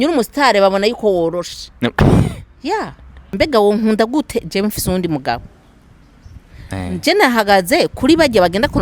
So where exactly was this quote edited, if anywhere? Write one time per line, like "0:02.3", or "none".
0:03.2